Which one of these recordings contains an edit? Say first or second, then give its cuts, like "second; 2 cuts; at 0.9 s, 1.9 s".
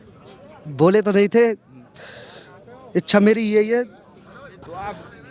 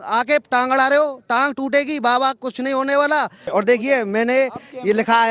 second; 1 cut; at 3.4 s